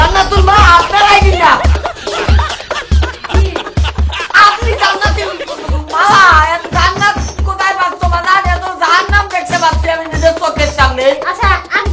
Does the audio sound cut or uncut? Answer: uncut